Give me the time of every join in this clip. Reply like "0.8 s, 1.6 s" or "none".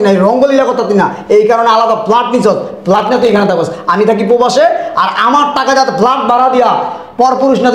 none